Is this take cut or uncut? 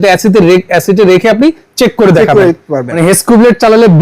cut